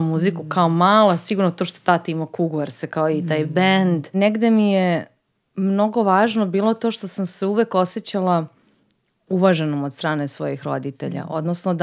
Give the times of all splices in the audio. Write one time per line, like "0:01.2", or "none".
0:04.1